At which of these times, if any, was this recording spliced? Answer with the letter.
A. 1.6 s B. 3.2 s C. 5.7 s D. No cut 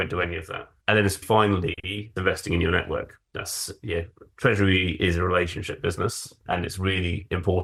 D